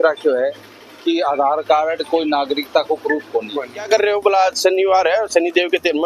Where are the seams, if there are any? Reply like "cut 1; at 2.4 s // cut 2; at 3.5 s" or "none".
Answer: cut 1; at 3.9 s

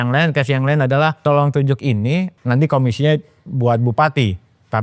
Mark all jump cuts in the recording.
cut 1; at 1.2 s // cut 2; at 2.4 s

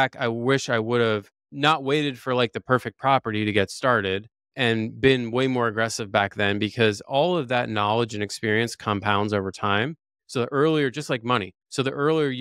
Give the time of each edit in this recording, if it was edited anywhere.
cut 1; at 1.4 s // cut 2; at 4.5 s

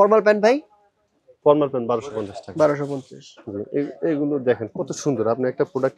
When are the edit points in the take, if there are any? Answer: none

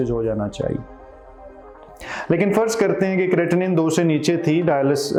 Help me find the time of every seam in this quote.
none

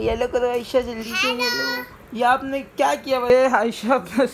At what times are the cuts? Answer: cut 1; at 3.2 s

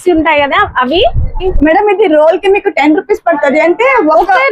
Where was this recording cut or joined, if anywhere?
cut 1; at 1.4 s

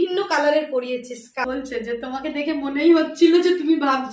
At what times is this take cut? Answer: cut 1; at 1.4 s

